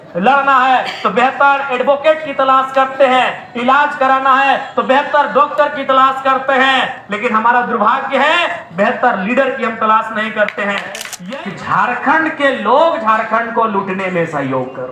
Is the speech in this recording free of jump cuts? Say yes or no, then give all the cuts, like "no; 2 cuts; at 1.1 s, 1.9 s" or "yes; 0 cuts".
no; 1 cut; at 11.1 s